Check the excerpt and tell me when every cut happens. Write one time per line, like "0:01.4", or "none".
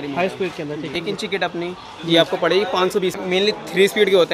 0:00.9
0:03.2

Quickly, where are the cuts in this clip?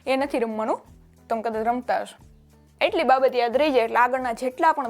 0:02.2

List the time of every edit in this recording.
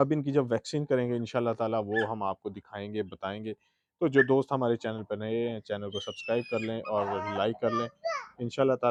none

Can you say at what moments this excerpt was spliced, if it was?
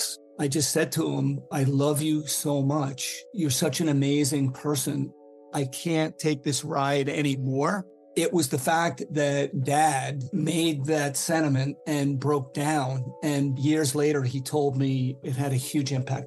none

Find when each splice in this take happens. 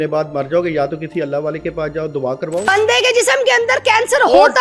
0:02.7

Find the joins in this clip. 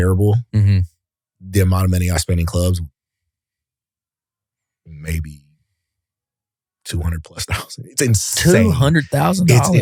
none

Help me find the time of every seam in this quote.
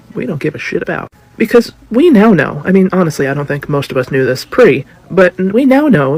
none

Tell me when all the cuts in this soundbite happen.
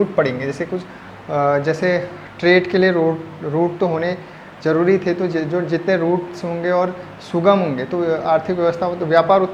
none

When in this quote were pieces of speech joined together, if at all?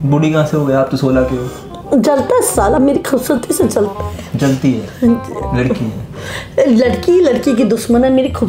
none

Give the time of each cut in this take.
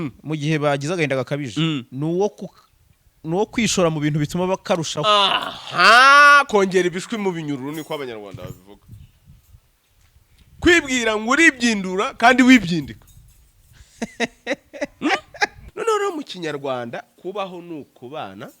0:15.6

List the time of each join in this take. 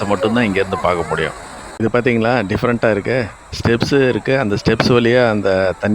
0:01.9

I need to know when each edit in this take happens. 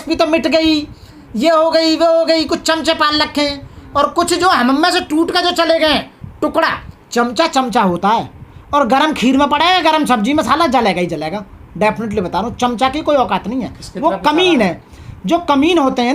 none

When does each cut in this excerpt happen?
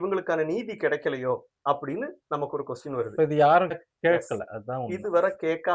none

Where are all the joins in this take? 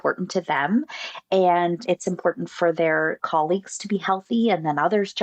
0:01.8
0:03.2

